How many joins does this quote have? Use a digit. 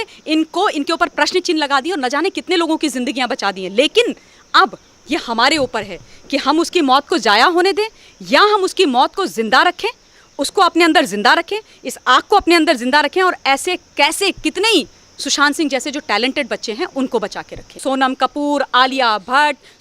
1